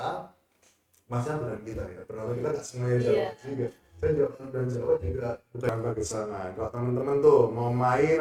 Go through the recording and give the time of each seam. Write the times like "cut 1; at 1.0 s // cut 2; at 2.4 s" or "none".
cut 1; at 5.7 s

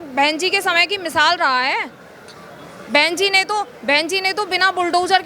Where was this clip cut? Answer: none

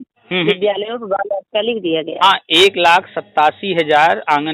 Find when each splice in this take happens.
none

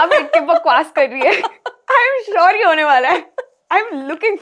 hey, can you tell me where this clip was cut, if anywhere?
none

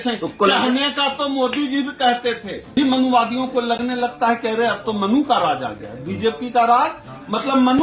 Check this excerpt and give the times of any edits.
cut 1; at 2.7 s

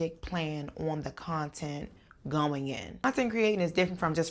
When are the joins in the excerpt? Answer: cut 1; at 3.0 s

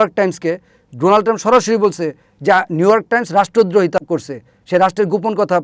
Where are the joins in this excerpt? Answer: cut 1; at 4.0 s

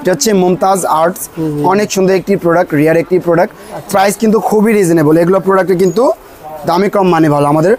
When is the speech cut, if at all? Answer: none

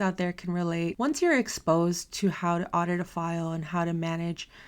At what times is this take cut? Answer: cut 1; at 0.9 s

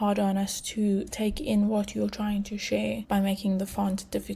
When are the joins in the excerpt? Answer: cut 1; at 0.8 s // cut 2; at 3.0 s

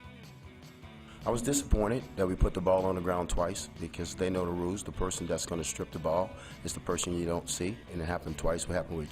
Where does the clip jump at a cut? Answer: cut 1; at 1.2 s

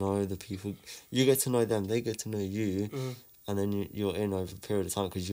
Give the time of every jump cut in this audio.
none

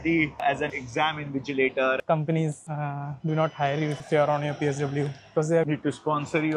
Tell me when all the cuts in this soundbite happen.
cut 1; at 2.0 s

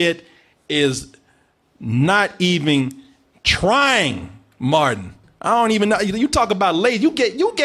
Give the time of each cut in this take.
none

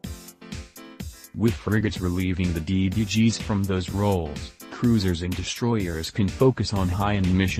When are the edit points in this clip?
cut 1; at 1.4 s

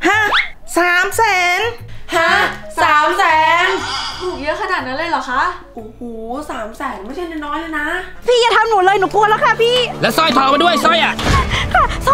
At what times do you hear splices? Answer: cut 1; at 8.2 s

